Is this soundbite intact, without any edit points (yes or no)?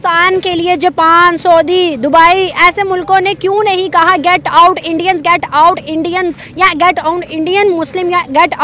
yes